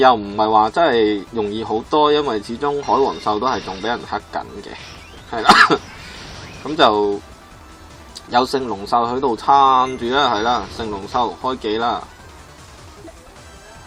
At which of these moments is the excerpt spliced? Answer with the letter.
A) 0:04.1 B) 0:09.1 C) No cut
B